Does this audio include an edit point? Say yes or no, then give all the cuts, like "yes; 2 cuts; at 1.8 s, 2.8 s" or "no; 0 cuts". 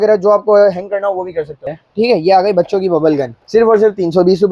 yes; 2 cuts; at 1.6 s, 3.4 s